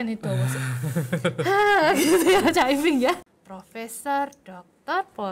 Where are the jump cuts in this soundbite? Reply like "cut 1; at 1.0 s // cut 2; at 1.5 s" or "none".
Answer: cut 1; at 3.2 s